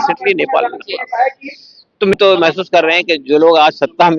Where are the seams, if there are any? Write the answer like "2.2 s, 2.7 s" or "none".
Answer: 2.1 s